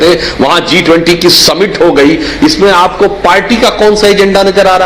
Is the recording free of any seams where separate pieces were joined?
no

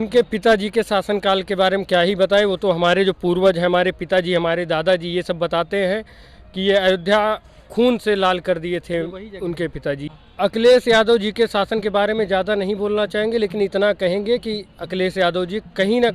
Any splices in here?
yes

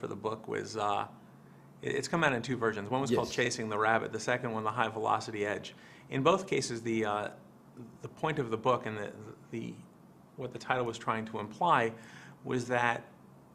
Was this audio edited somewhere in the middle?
yes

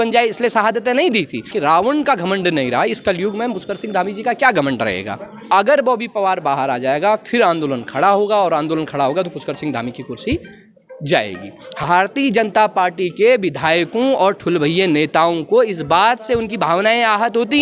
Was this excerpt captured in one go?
no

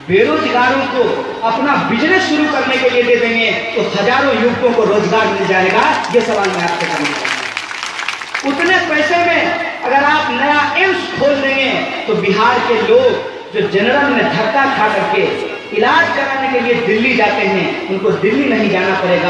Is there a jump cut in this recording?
no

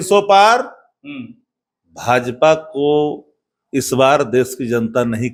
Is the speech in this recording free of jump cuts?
yes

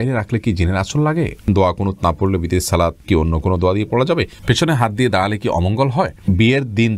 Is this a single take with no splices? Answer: no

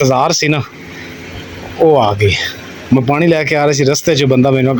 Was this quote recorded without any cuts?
yes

